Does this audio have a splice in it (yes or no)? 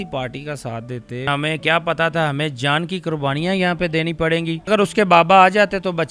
yes